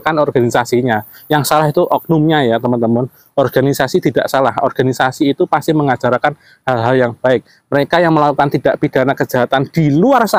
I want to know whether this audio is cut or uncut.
uncut